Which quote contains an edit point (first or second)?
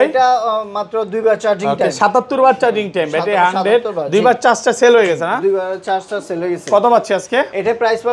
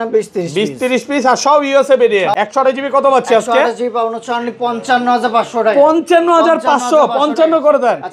second